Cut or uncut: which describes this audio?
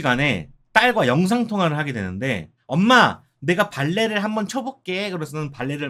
uncut